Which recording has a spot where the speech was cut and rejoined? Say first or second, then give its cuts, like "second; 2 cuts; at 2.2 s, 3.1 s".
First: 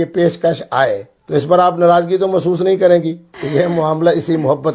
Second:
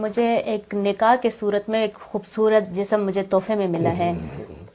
first; 2 cuts; at 1.1 s, 3.4 s